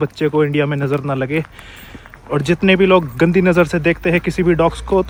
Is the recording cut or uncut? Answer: uncut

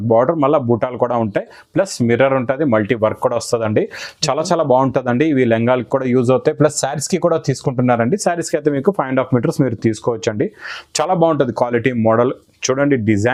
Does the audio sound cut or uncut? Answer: uncut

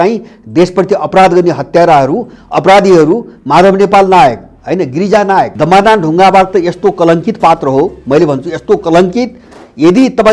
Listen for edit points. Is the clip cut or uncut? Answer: cut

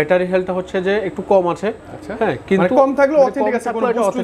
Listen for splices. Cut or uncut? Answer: uncut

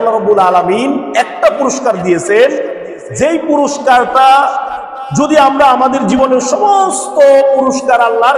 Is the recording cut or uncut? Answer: uncut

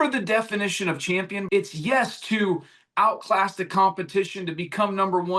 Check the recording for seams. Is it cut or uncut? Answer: cut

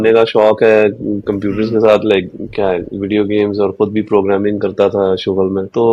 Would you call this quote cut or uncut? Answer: uncut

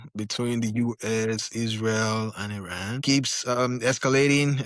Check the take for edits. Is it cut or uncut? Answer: cut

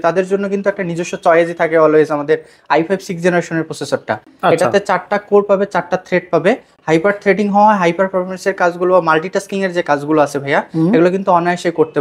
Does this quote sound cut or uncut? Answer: uncut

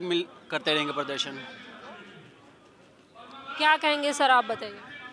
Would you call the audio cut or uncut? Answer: uncut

